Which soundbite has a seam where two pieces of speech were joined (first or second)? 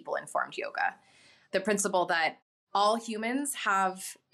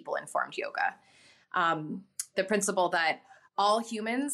first